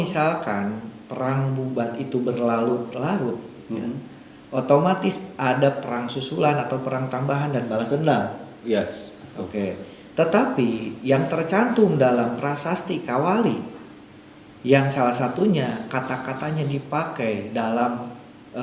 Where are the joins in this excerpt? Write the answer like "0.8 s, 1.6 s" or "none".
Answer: none